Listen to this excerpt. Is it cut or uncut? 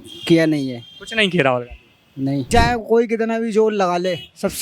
cut